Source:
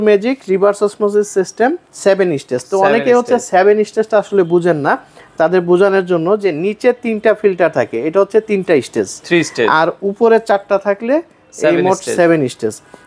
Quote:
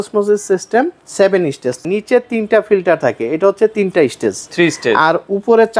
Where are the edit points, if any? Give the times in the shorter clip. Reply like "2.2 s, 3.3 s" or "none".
1.8 s